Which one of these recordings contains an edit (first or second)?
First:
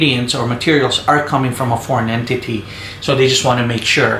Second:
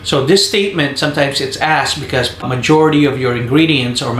second